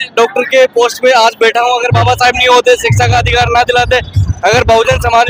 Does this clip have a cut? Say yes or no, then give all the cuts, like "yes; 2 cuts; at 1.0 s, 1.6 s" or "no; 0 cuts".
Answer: no; 0 cuts